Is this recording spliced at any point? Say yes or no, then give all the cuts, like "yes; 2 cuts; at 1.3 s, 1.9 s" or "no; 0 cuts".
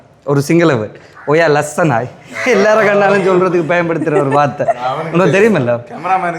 no; 0 cuts